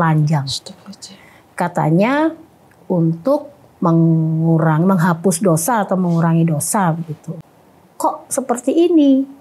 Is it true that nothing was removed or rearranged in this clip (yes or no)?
no